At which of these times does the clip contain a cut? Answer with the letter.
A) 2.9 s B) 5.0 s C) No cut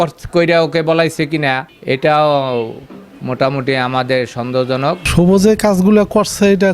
B